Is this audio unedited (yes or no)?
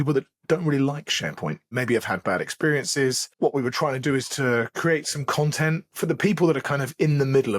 no